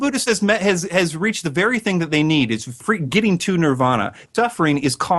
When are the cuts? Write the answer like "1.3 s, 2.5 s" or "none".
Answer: 2.8 s, 4.2 s